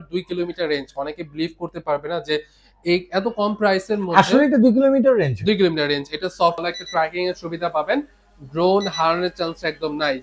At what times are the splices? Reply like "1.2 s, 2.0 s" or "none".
6.6 s